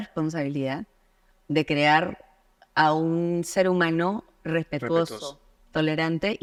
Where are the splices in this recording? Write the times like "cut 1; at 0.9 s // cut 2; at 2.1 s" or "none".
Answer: none